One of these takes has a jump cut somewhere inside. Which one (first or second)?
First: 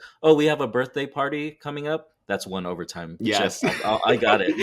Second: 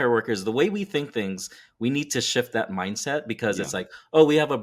first